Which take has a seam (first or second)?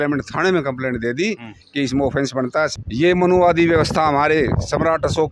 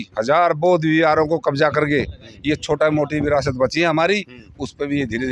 first